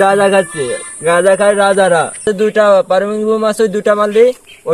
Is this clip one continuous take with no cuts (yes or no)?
no